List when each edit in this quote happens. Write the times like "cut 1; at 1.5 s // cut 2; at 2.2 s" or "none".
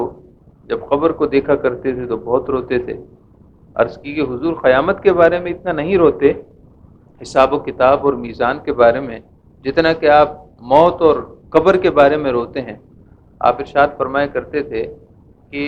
none